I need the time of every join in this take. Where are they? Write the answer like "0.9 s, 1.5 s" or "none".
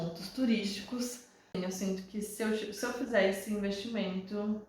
1.6 s